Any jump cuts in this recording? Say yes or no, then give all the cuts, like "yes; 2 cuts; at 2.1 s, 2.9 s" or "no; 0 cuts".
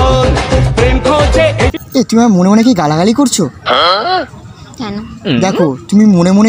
yes; 1 cut; at 1.8 s